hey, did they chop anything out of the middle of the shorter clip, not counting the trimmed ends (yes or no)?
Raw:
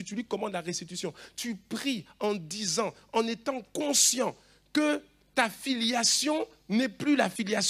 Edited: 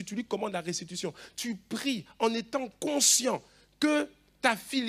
yes